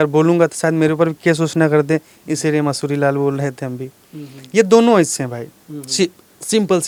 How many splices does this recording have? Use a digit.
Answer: 0